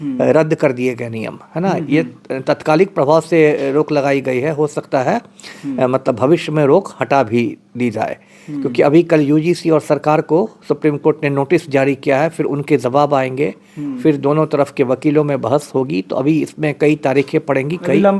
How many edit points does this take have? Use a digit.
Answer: 0